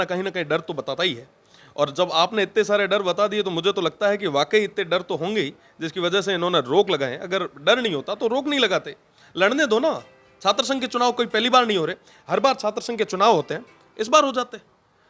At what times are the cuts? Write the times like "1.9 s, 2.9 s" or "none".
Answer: none

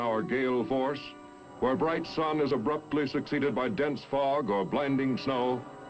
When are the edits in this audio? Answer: 1.6 s

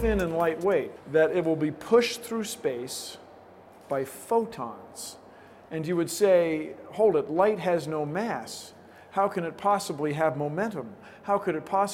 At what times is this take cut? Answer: 1.0 s

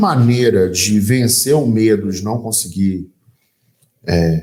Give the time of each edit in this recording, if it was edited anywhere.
none

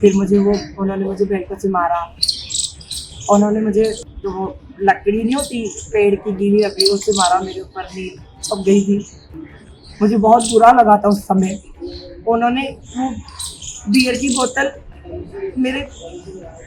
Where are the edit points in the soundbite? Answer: 4.1 s

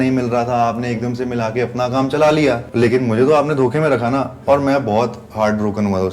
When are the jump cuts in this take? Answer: 2.7 s

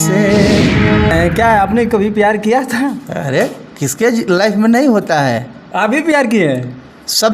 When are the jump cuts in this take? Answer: 1.1 s

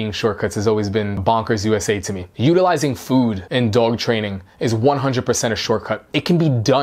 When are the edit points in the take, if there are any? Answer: 1.2 s, 3.4 s, 6.0 s

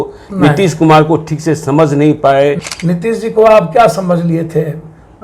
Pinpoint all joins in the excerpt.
2.6 s

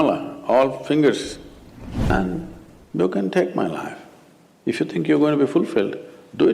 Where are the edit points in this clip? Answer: 2.1 s

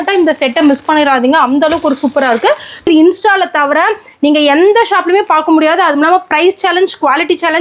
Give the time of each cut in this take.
2.9 s

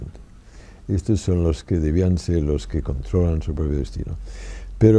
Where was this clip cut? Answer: 1.7 s

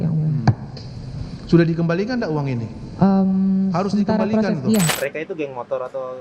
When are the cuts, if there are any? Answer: 4.9 s

